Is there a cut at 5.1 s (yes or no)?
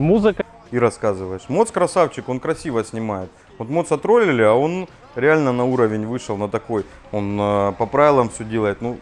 no